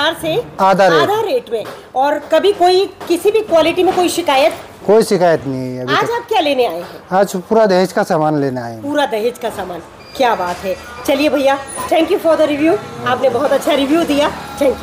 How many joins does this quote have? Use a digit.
0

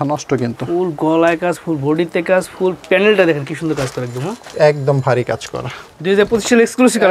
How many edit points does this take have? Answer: 1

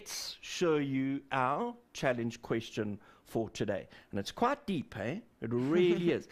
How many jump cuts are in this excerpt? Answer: 0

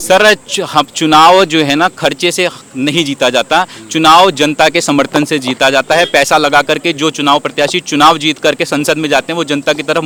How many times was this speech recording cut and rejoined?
0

